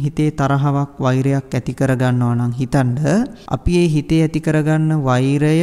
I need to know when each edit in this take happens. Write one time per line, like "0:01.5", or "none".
0:03.5